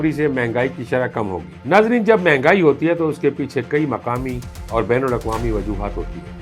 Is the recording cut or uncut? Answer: cut